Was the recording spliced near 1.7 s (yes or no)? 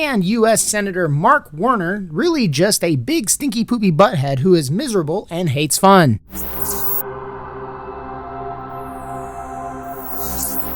no